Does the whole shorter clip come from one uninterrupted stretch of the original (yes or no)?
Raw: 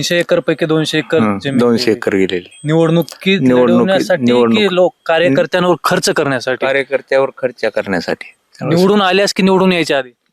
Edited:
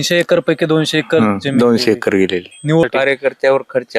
no